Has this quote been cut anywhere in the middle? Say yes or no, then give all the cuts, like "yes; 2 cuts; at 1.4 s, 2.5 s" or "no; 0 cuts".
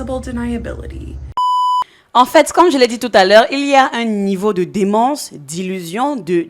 yes; 1 cut; at 1.5 s